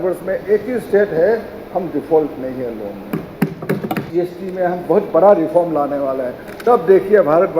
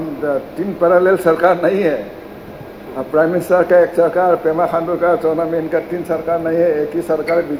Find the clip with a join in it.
first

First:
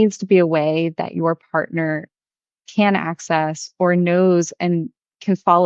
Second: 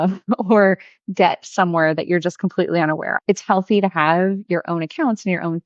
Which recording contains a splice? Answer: second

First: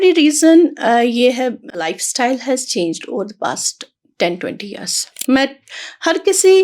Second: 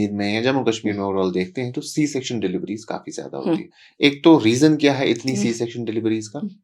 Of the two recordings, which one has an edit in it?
first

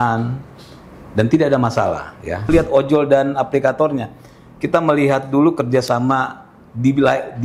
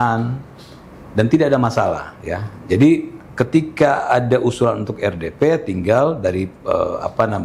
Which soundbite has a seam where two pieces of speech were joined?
first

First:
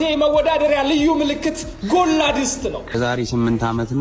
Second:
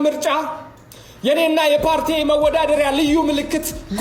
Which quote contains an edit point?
first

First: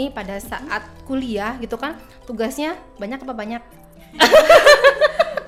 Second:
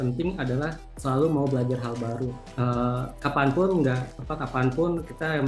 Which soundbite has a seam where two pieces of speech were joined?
second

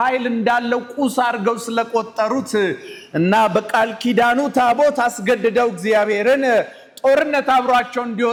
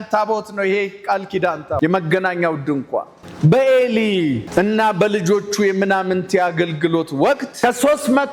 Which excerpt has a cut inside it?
second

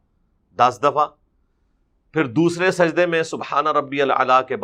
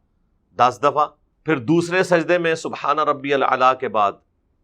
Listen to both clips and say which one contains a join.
second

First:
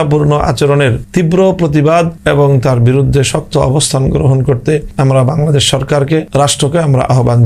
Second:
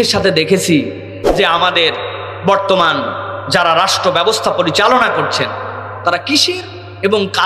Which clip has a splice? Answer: first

